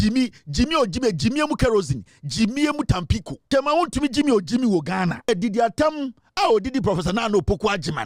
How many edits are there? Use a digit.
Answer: 2